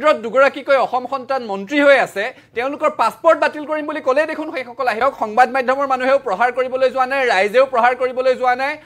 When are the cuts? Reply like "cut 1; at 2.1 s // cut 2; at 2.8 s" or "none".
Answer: cut 1; at 5.0 s